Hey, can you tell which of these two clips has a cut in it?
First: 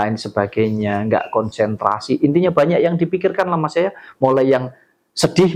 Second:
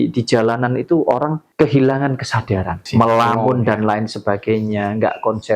second; 2 cuts; at 1.4 s, 2.8 s

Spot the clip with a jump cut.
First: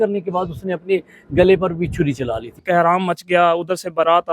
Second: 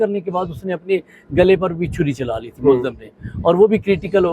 first; 1 cut; at 2.6 s

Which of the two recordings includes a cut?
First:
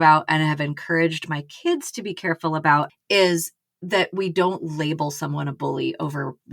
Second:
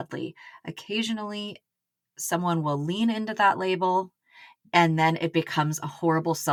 first; 1 cut; at 3.0 s

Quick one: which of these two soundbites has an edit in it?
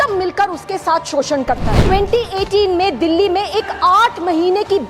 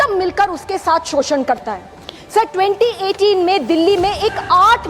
first; 1 cut; at 1.8 s

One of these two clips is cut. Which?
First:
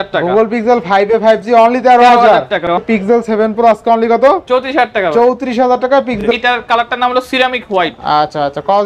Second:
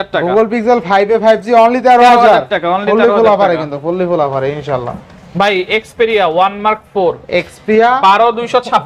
first; 2 cuts; at 2.7 s, 6.2 s

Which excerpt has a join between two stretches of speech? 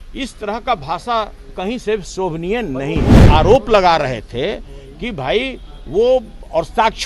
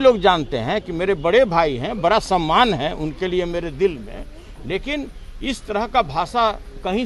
first; 1 cut; at 3.2 s

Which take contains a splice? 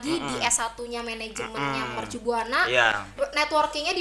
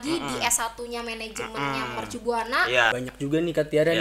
second; 1 cut; at 3.1 s

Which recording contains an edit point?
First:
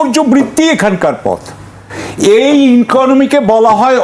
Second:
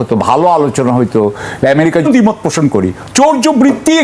second; 1 cut; at 2.0 s

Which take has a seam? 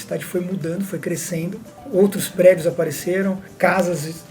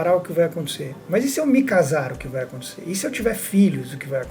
first; 2 cuts; at 1.7 s, 3.5 s

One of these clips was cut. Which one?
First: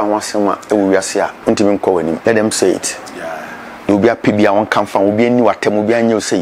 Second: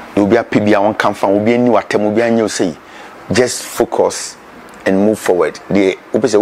first; 2 cuts; at 1.4 s, 2.2 s

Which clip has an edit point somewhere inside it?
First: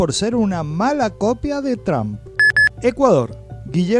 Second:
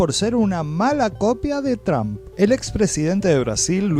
first; 1 cut; at 2.2 s

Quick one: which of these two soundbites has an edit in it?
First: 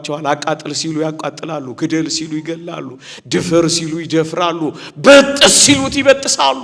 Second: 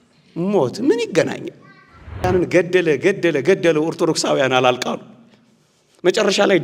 second; 1 cut; at 2.2 s

